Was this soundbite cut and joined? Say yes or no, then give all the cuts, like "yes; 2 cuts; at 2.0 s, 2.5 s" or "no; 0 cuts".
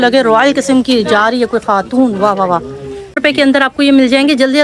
yes; 1 cut; at 3.2 s